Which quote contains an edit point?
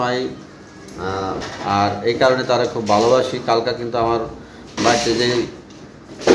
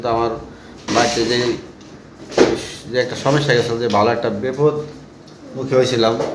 first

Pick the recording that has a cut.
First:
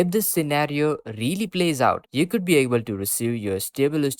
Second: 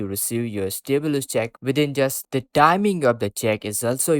second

